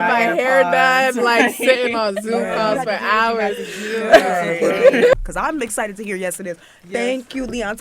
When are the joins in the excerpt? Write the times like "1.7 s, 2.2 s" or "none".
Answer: 5.2 s

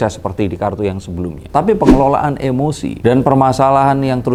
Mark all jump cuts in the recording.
none

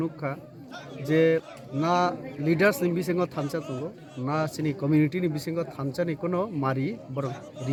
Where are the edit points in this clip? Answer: none

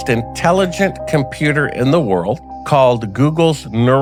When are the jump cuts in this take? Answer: none

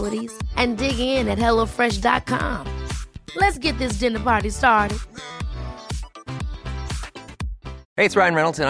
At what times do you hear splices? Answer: none

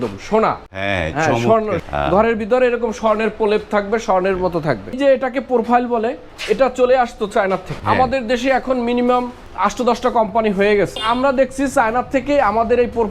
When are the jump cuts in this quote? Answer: 1.8 s, 4.9 s, 6.3 s, 7.7 s, 9.4 s, 11.0 s

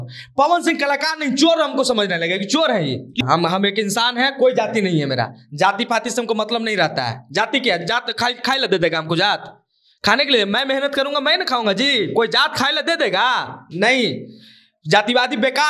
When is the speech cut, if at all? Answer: 3.2 s

